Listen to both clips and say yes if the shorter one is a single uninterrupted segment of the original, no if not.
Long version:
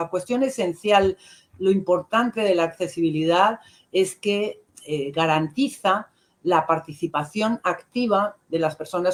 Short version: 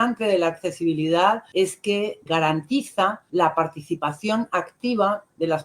no